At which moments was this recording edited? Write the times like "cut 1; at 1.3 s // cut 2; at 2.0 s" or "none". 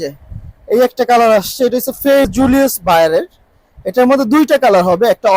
cut 1; at 2.3 s